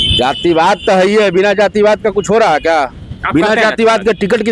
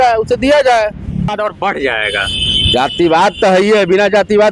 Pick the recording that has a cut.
second; 1 cut; at 1.3 s

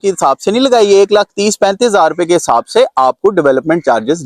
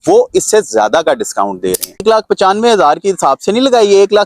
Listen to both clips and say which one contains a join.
second; 1 cut; at 2.0 s

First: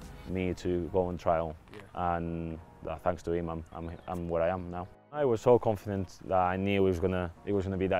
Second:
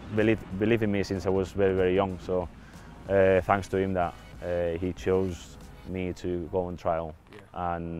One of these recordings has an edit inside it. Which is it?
first; 1 cut; at 4.9 s

